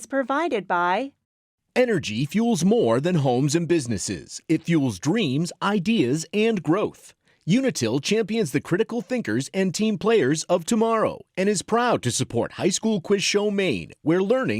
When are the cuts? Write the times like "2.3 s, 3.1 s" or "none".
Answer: 1.5 s